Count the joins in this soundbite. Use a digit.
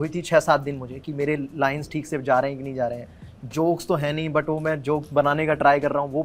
0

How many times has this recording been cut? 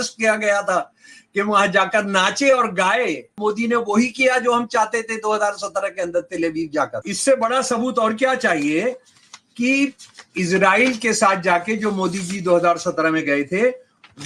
2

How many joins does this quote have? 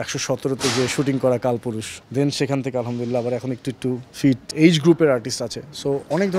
2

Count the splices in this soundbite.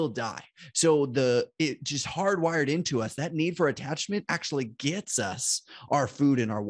0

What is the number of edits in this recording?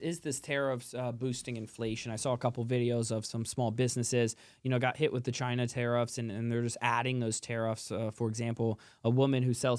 0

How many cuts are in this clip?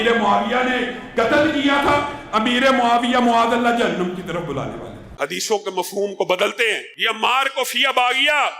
1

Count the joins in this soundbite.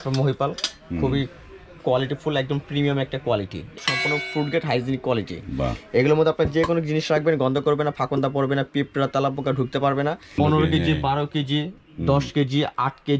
2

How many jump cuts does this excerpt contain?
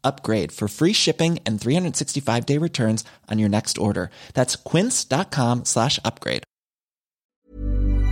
1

